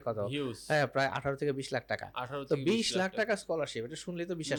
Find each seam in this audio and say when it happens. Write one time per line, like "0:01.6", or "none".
none